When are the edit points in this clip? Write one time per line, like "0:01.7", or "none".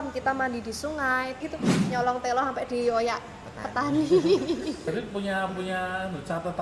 0:01.4
0:04.9